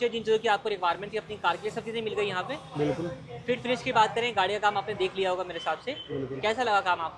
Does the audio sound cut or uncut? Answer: uncut